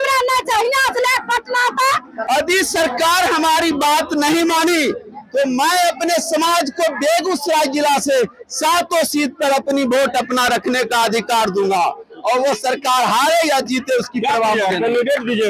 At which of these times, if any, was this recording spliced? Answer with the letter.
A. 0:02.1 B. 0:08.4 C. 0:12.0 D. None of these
A